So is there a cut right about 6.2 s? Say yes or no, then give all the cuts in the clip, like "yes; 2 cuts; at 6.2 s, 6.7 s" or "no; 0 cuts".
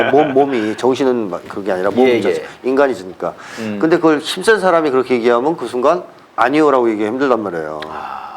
yes; 1 cut; at 6.2 s